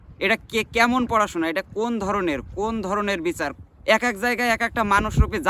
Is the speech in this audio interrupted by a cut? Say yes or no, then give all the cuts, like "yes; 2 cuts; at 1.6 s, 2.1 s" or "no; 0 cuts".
yes; 1 cut; at 3.5 s